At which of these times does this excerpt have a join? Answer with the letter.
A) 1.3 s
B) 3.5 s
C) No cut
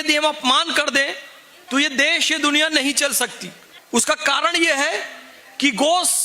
C